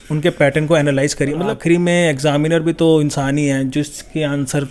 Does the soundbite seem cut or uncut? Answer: cut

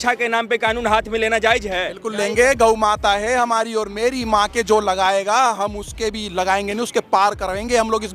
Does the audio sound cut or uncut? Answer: uncut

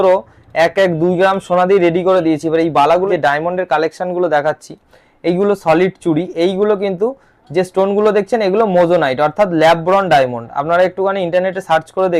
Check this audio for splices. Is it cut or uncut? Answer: cut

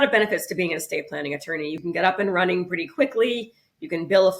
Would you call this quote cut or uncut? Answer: cut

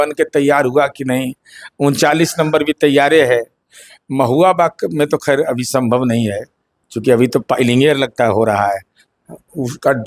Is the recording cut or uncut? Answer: uncut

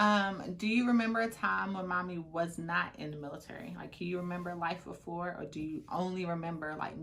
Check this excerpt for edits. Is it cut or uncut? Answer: uncut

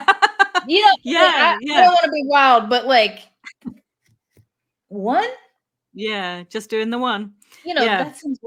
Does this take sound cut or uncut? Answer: uncut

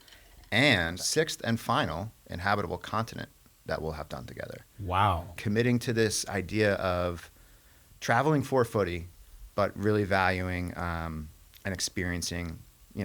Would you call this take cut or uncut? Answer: cut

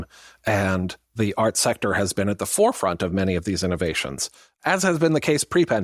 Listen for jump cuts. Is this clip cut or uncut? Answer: uncut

